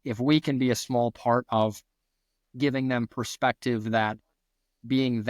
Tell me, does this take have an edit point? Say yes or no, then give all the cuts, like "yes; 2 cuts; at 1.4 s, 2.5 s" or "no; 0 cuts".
no; 0 cuts